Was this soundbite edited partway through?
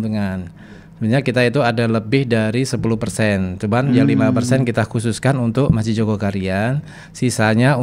no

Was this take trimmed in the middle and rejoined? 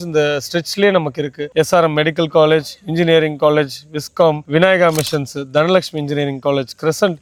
no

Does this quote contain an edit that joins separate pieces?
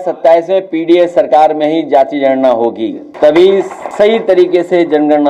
yes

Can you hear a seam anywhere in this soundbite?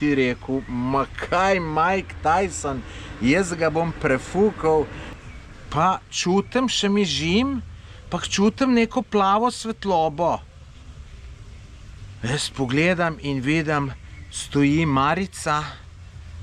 yes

